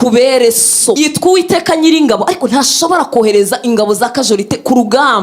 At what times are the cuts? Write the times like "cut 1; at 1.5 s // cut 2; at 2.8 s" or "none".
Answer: cut 1; at 1.0 s